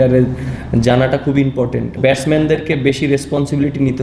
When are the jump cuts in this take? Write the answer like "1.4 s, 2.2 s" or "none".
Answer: 2.0 s